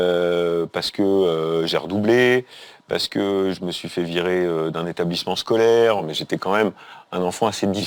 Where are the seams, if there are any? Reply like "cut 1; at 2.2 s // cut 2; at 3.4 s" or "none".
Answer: cut 1; at 6.1 s